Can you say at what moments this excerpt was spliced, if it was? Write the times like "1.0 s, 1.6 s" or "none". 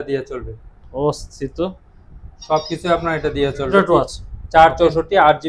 3.7 s